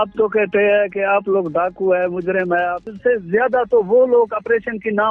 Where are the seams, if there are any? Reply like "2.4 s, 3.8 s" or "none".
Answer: 2.9 s